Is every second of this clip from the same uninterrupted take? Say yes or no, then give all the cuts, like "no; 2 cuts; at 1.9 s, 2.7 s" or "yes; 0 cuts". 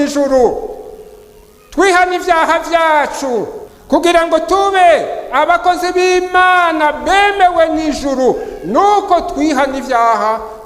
no; 1 cut; at 3.6 s